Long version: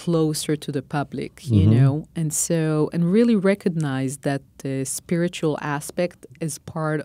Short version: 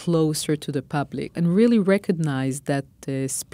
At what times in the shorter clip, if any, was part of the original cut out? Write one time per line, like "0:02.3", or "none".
0:01.3